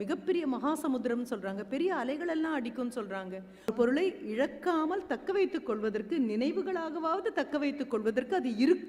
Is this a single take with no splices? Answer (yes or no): no